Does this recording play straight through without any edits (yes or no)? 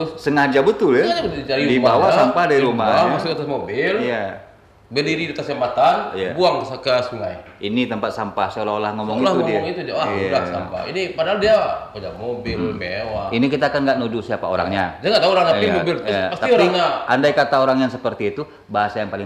yes